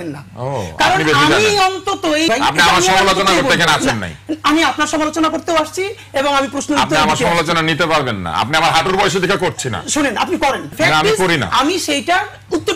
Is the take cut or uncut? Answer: cut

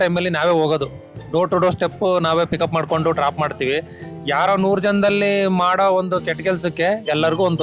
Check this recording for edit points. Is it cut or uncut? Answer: uncut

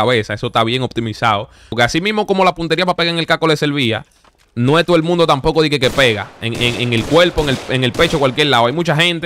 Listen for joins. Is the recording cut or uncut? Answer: cut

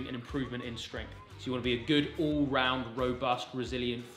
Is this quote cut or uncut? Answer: uncut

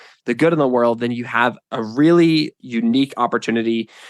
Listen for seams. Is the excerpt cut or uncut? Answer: cut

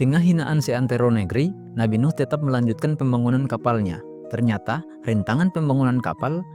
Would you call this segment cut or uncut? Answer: uncut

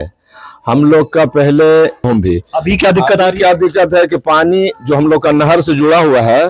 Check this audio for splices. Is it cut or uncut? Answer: cut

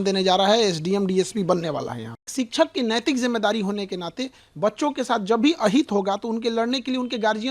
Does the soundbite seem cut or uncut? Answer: cut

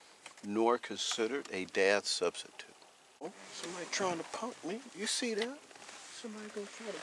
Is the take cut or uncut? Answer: cut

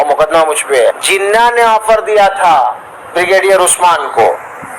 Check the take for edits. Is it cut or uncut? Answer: cut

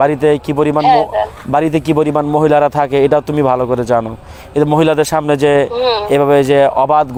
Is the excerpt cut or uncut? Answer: uncut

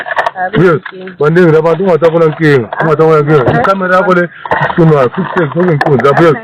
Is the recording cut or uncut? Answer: uncut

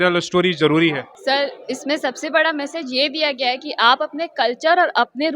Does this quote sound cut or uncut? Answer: cut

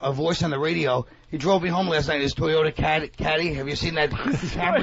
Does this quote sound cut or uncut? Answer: cut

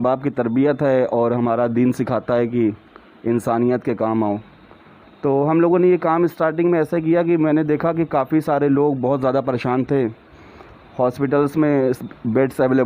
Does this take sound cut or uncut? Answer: uncut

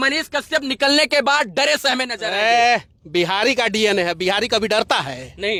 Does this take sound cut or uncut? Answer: uncut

